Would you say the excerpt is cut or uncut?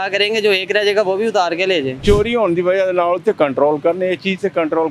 cut